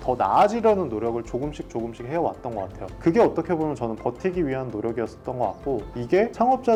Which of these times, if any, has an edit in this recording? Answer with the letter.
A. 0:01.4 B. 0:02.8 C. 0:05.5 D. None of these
D